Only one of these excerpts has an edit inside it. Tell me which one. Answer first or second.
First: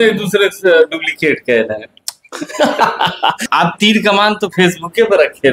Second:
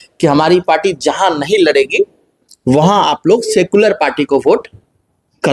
first